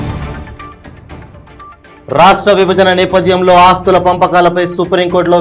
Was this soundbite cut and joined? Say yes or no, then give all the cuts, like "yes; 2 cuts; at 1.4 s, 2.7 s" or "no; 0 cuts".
no; 0 cuts